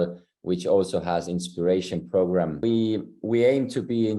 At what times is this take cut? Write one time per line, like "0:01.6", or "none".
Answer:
0:02.6